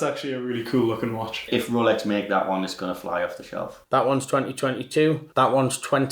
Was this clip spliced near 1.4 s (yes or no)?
yes